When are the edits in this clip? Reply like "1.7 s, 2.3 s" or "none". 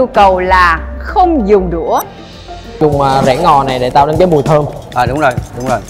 2.8 s